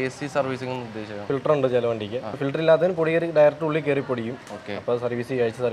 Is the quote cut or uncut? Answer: cut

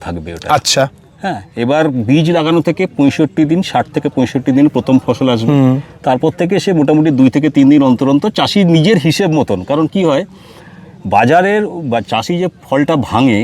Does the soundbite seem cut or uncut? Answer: uncut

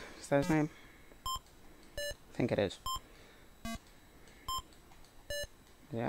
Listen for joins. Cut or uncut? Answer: uncut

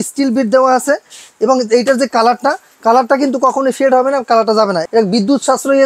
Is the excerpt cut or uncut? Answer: cut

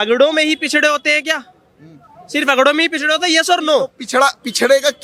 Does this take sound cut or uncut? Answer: uncut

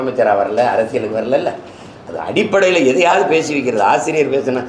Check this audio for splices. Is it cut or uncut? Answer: uncut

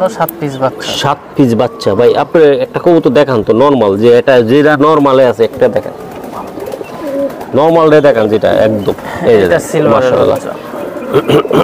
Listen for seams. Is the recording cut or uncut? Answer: uncut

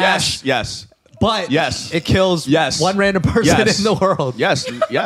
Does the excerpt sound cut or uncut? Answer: uncut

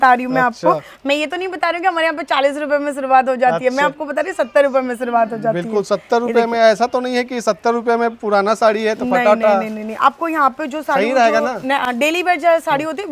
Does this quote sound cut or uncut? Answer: uncut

